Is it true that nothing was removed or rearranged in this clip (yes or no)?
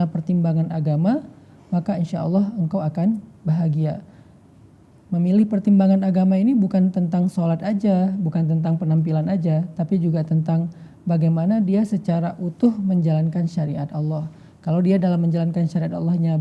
yes